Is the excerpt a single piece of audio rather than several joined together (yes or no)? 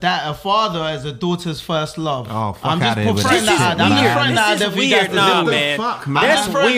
yes